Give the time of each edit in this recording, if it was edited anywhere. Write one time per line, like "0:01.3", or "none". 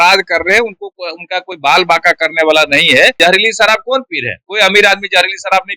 0:03.1